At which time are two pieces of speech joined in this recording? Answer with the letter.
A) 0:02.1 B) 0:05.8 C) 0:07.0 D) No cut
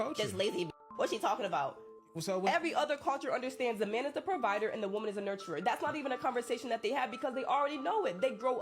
B